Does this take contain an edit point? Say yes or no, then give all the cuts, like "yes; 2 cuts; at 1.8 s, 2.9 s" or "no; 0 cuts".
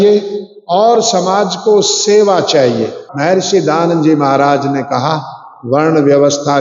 yes; 1 cut; at 3.1 s